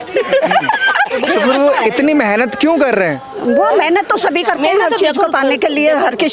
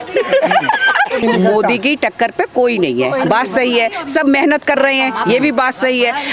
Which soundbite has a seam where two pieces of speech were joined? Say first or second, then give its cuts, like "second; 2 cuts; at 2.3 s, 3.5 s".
second; 1 cut; at 1.2 s